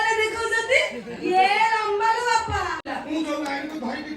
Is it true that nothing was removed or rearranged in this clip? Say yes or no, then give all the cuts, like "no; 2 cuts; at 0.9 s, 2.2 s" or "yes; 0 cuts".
no; 1 cut; at 2.8 s